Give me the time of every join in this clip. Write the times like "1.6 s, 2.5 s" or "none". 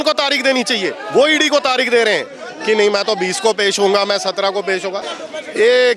5.0 s